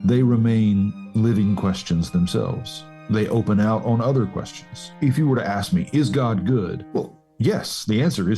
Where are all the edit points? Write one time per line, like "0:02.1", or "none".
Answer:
0:01.0
0:04.9
0:06.8